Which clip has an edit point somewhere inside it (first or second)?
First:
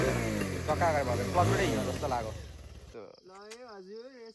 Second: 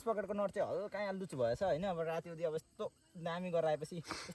first